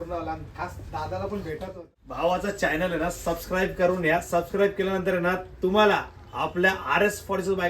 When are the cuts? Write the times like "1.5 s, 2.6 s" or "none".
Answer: 1.7 s